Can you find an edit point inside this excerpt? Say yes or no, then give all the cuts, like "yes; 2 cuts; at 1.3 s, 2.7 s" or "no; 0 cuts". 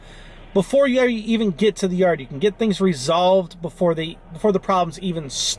no; 0 cuts